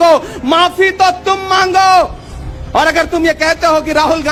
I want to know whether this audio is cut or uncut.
uncut